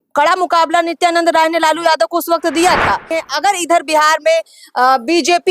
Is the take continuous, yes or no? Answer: no